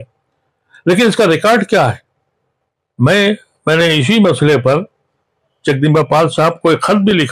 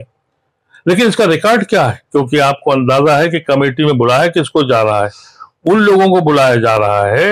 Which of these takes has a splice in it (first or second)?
second